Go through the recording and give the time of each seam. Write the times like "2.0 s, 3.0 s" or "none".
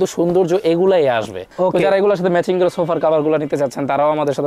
none